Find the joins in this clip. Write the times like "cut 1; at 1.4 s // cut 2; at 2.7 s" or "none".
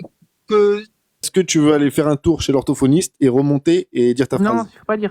cut 1; at 1.3 s